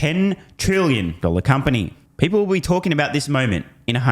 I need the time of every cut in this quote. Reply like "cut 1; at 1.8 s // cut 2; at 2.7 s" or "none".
cut 1; at 2.0 s